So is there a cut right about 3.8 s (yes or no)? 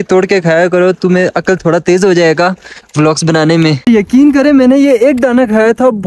yes